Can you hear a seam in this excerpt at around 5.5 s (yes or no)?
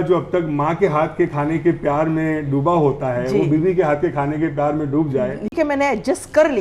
yes